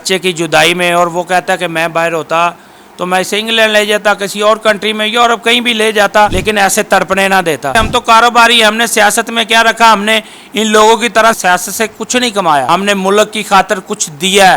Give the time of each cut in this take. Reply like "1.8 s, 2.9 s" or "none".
6.4 s, 7.7 s, 11.4 s, 12.7 s